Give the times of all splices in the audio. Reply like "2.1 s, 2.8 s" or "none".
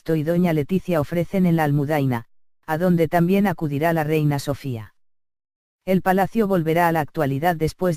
3.6 s